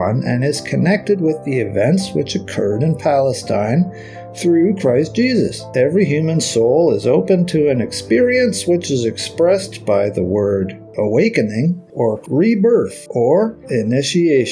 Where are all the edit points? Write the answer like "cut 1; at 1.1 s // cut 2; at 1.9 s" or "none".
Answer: cut 1; at 5.7 s // cut 2; at 10.9 s // cut 3; at 12.2 s // cut 4; at 13.0 s // cut 5; at 13.6 s